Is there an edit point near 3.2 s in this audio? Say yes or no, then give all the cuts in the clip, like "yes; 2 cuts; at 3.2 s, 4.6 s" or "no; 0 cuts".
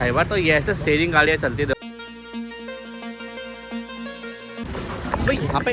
no; 2 cuts; at 1.8 s, 4.6 s